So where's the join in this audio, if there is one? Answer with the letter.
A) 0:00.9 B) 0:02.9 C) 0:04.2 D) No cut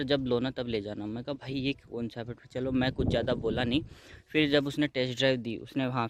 D